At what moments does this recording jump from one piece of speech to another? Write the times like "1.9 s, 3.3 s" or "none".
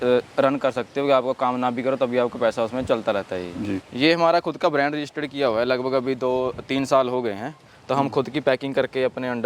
3.9 s

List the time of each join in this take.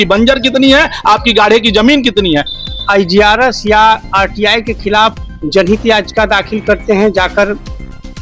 2.5 s

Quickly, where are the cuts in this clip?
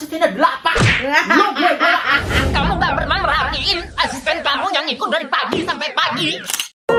none

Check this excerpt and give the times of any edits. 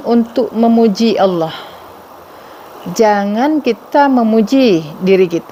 none

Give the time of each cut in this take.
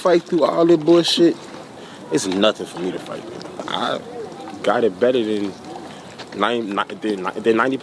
3.6 s

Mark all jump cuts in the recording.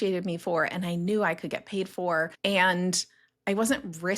2.3 s

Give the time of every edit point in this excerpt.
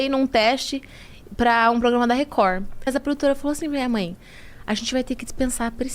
2.9 s

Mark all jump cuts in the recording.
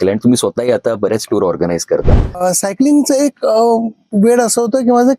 2.2 s

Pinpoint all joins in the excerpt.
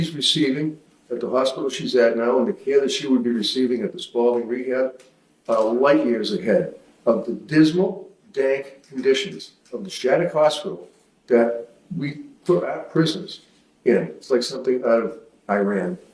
none

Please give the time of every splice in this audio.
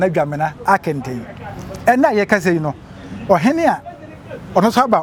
none

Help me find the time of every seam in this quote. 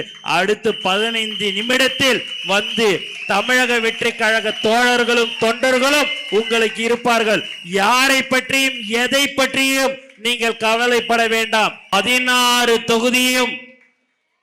11.9 s

